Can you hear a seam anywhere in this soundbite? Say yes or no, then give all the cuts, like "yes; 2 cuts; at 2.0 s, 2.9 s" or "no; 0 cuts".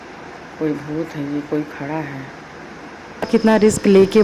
yes; 1 cut; at 3.3 s